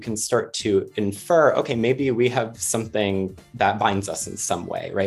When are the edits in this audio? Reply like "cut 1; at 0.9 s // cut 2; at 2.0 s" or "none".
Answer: none